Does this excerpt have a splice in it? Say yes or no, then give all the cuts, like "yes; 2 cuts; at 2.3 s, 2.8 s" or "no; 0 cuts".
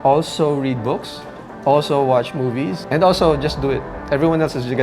yes; 1 cut; at 2.8 s